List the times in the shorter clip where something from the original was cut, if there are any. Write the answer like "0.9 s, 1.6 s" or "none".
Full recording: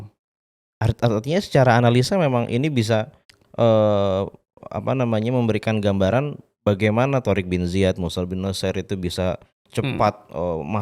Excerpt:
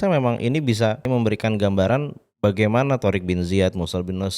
1.0 s